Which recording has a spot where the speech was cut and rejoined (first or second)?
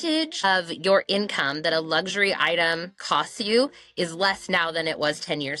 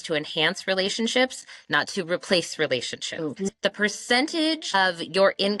second